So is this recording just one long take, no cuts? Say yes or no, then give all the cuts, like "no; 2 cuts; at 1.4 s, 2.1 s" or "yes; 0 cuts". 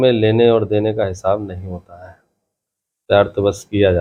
yes; 0 cuts